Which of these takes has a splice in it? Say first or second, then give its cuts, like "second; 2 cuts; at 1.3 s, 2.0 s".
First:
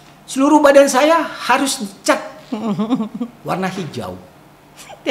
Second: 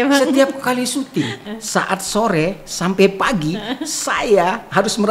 second; 1 cut; at 1.4 s